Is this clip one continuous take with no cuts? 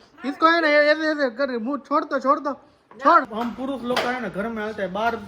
no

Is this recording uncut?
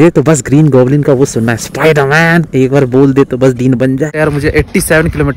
no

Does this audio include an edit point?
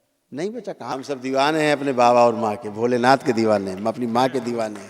yes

